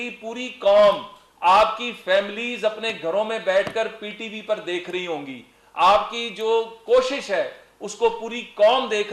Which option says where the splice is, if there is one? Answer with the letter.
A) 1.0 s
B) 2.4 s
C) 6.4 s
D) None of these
B